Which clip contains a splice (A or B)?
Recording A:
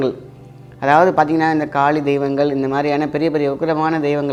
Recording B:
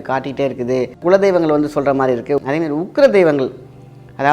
B